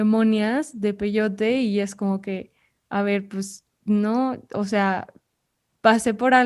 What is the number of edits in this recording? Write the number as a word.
zero